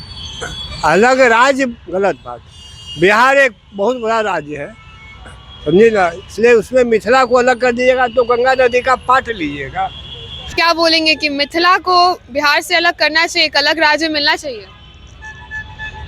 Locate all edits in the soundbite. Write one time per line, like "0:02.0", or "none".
0:10.3